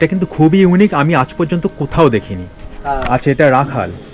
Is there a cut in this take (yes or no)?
yes